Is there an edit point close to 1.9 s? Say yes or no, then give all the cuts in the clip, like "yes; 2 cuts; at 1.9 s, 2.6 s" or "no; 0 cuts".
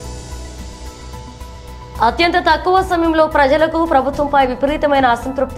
yes; 2 cuts; at 1.2 s, 1.9 s